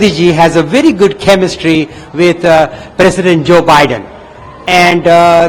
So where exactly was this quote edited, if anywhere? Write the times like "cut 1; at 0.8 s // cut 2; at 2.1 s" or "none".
none